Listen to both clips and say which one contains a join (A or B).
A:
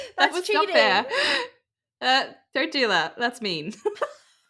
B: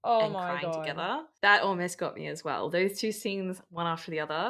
B